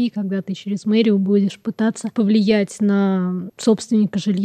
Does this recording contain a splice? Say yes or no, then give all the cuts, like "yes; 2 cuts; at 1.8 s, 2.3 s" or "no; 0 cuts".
no; 0 cuts